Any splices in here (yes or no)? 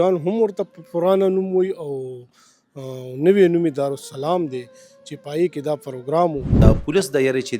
yes